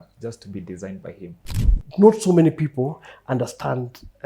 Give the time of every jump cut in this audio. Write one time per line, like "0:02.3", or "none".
0:01.5